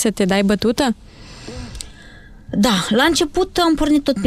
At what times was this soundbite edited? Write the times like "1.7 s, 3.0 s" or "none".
none